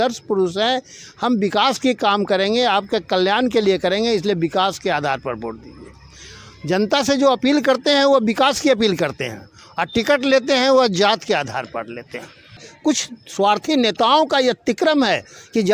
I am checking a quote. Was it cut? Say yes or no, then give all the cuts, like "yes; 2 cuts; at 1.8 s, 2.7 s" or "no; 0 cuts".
yes; 1 cut; at 12.7 s